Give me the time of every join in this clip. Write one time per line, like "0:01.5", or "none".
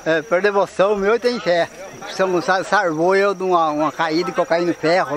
0:02.1